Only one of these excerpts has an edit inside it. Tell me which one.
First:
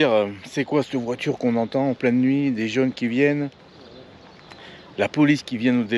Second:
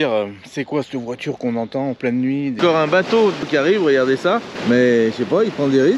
second; 3 cuts; at 2.6 s, 3.5 s, 4.5 s

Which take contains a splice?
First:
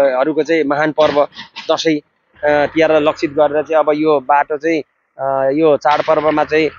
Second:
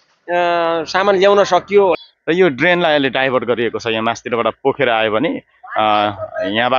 second; 1 cut; at 1.9 s

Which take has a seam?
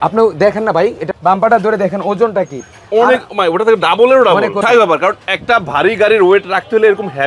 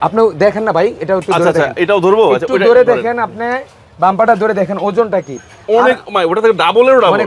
first; 2 cuts; at 1.0 s, 4.6 s

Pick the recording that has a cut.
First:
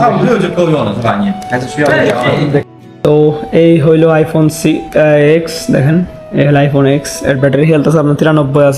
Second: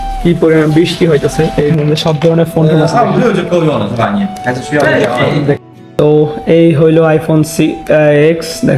second; 1 cut; at 1.6 s

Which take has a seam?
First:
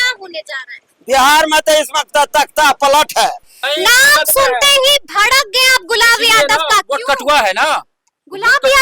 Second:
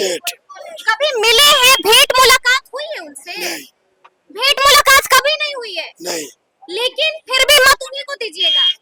first; 1 cut; at 3.6 s

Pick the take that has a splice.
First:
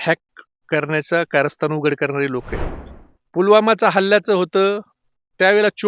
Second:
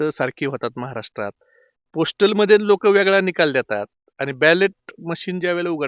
first; 1 cut; at 2.6 s

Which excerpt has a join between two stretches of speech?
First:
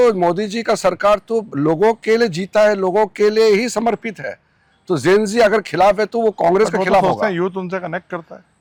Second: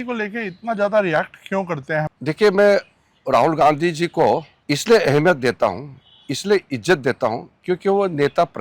second; 2 cuts; at 2.1 s, 4.5 s

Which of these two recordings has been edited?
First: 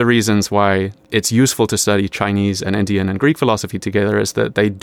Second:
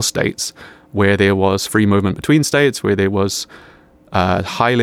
first; 1 cut; at 1.0 s

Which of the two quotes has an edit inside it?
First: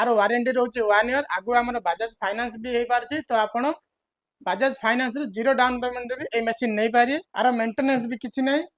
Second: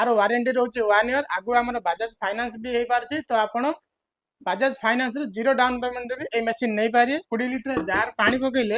second; 1 cut; at 7.3 s

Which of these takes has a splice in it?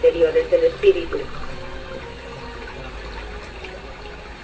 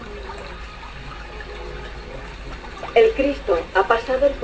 first; 1 cut; at 1.2 s

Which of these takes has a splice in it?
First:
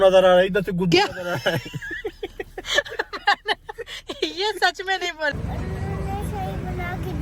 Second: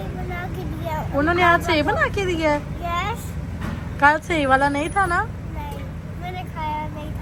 first; 2 cuts; at 2.6 s, 5.6 s

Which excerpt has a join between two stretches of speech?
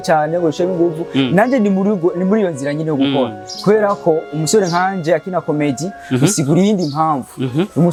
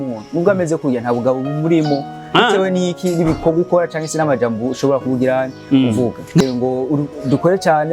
second; 1 cut; at 6.4 s

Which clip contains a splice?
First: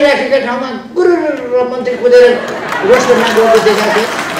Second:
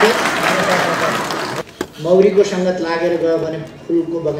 second; 1 cut; at 1.6 s

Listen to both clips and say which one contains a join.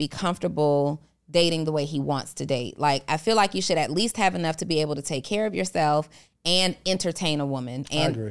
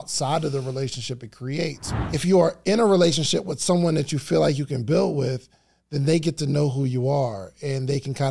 second; 1 cut; at 1.9 s

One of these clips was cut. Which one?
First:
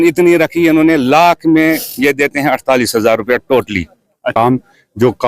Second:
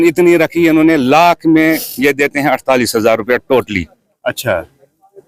first; 1 cut; at 4.3 s

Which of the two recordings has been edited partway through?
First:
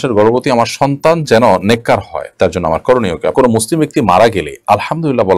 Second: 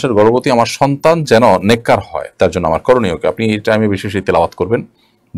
first; 1 cut; at 3.3 s

